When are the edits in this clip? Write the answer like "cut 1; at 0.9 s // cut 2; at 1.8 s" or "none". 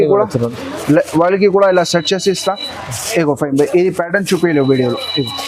none